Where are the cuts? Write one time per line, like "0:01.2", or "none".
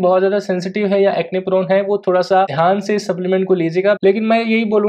0:02.5
0:04.0